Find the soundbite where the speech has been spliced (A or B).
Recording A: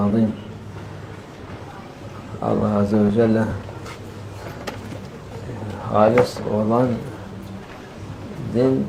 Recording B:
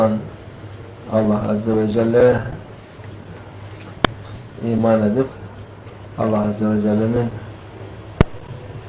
B